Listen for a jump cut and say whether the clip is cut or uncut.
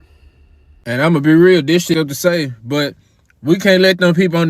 cut